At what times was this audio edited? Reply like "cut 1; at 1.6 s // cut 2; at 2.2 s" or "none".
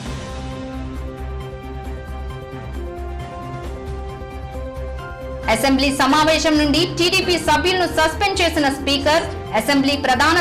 cut 1; at 3.3 s